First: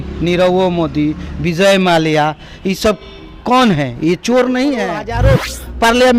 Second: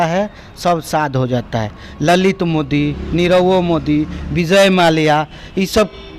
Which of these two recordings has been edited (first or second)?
first